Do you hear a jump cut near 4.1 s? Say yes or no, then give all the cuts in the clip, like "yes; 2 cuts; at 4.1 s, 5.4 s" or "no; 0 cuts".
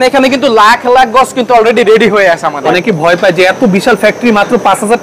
no; 1 cut; at 2.5 s